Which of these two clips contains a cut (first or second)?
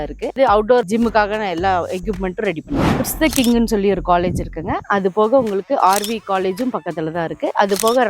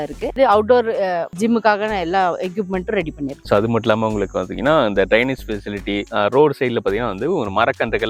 first